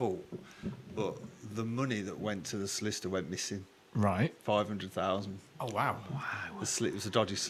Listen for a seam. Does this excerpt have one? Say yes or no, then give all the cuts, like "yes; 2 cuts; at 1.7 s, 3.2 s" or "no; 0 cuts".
no; 0 cuts